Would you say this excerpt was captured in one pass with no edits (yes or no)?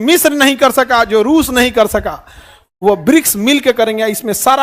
yes